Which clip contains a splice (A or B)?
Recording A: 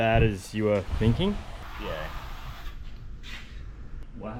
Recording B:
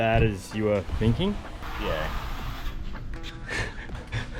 B